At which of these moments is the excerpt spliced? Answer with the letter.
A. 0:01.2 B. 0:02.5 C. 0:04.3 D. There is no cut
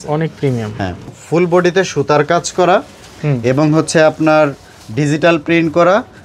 A